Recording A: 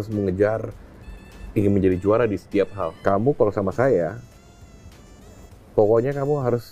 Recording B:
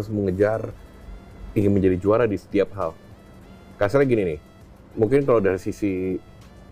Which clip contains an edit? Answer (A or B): A